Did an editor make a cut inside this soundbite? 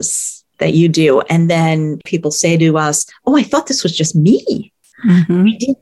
yes; 2 cuts; at 2.0 s, 3.1 s

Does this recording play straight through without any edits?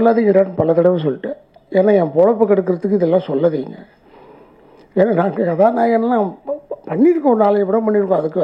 yes; 0 cuts

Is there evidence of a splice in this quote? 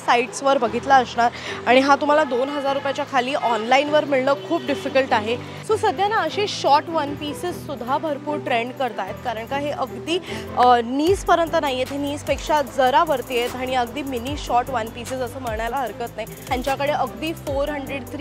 yes; 2 cuts; at 5.5 s, 16.5 s

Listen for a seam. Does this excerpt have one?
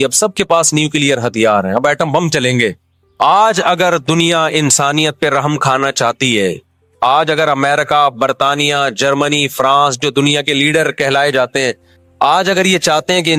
no; 0 cuts

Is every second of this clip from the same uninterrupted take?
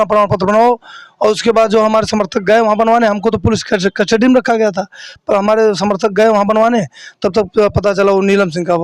yes; 0 cuts

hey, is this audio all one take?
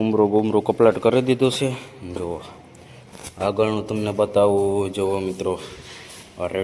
yes; 0 cuts

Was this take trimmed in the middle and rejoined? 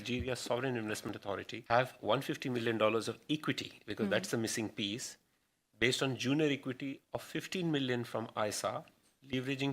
yes; 1 cut; at 1.0 s

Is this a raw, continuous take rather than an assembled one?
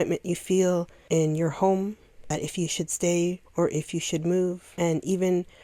no; 4 cuts; at 0.9 s, 2.3 s, 3.4 s, 4.7 s

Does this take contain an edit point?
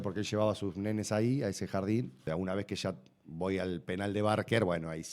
yes; 1 cut; at 2.1 s

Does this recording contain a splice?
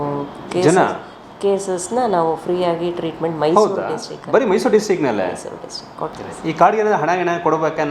yes; 1 cut; at 6.1 s

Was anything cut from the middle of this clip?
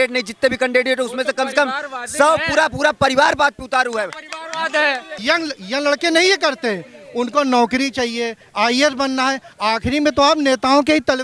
yes; 1 cut; at 5.1 s

